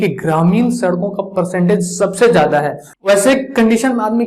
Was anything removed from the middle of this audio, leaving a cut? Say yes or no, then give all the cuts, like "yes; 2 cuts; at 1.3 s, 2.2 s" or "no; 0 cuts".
yes; 1 cut; at 2.8 s